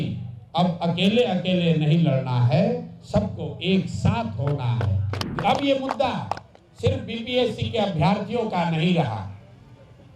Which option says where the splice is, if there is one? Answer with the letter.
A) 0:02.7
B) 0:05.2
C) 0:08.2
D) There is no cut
B